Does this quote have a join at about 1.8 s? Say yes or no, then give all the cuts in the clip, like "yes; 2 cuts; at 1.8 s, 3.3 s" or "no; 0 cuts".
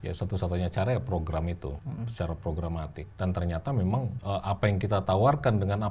yes; 3 cuts; at 1.8 s, 3.0 s, 4.2 s